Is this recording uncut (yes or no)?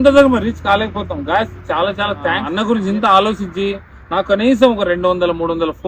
no